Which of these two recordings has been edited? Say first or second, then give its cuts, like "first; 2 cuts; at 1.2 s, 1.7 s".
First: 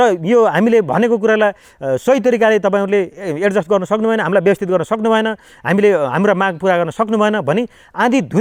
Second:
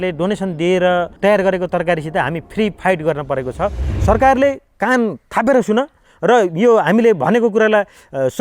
second; 1 cut; at 3.9 s